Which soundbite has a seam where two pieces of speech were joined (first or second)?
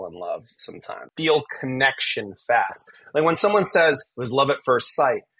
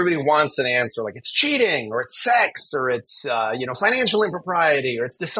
first